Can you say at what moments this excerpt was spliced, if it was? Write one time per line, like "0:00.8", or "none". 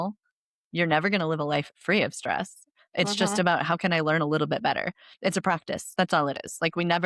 none